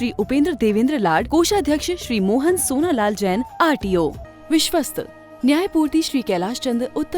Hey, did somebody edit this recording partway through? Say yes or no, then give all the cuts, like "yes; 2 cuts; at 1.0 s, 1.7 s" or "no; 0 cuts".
yes; 1 cut; at 4.3 s